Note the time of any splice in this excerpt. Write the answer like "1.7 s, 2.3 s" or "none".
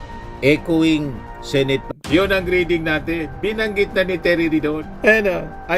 1.9 s

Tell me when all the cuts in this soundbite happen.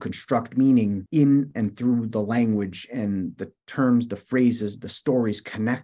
1.0 s

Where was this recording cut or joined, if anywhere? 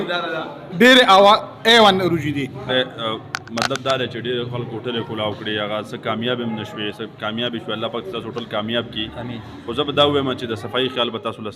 2.7 s

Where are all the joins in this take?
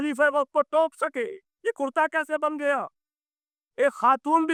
none

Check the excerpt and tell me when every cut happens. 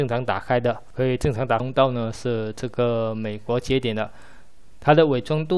1.4 s

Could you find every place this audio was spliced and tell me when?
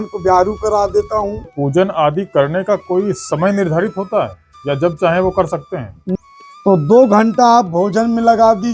1.5 s, 6.2 s

